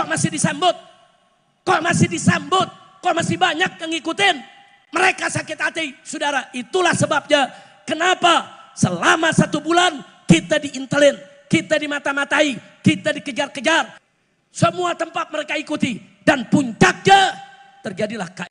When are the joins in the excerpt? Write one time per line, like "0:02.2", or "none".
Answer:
0:14.0